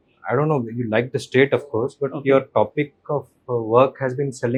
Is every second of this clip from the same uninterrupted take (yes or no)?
yes